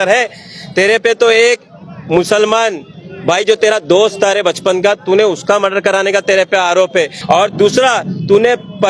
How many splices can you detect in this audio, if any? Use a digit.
1